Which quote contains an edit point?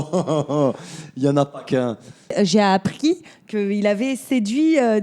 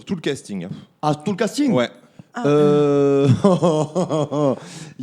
first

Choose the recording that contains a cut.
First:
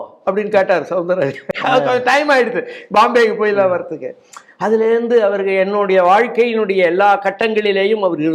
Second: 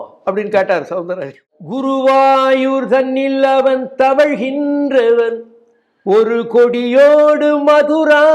second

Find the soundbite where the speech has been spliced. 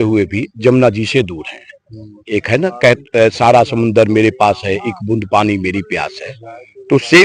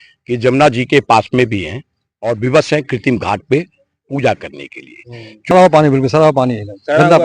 second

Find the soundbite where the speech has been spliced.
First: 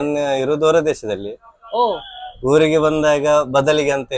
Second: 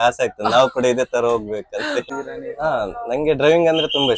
second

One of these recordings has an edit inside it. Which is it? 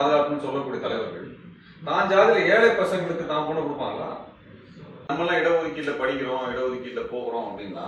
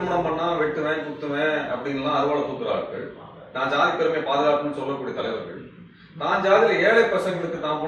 first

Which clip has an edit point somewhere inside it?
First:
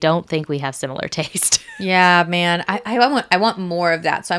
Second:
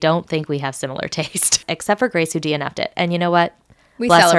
second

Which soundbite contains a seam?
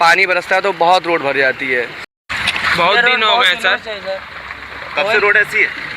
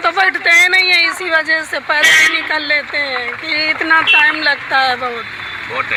first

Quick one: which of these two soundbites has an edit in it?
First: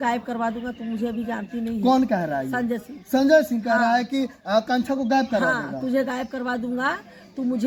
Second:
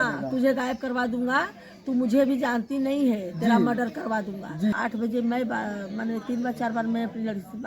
second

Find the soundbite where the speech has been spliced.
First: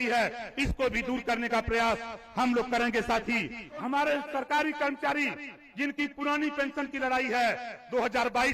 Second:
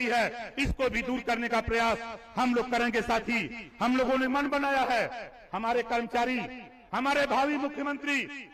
first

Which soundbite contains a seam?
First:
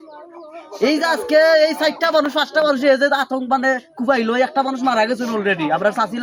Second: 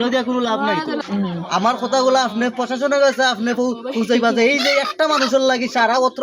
second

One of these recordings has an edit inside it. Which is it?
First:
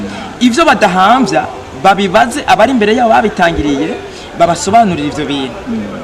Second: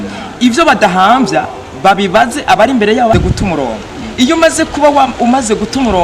second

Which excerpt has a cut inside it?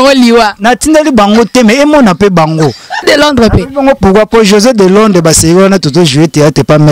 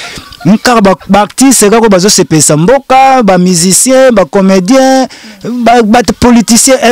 first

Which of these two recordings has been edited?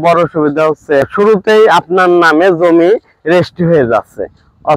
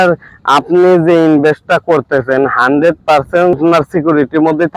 first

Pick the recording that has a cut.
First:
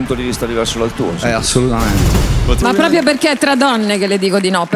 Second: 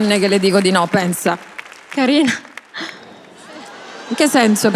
first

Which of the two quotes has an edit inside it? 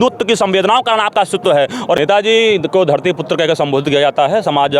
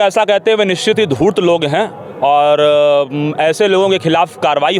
first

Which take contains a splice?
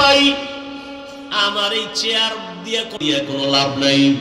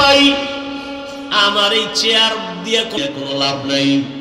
second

